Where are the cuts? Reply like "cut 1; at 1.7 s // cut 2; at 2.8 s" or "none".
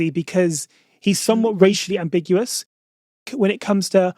cut 1; at 1.7 s // cut 2; at 3.1 s